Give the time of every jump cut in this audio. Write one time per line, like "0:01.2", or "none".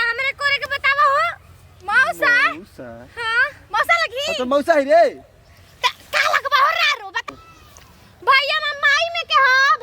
0:07.3